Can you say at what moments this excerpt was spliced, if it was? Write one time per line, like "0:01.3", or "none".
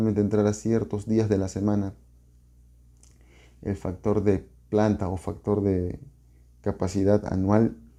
none